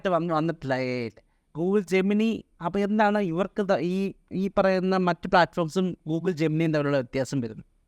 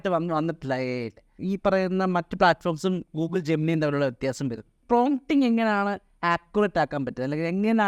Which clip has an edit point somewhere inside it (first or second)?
second